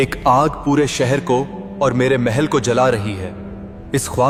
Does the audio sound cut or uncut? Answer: uncut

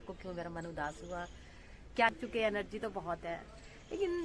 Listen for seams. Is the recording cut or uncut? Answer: cut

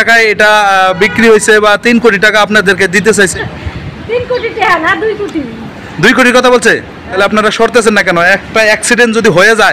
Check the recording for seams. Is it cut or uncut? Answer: cut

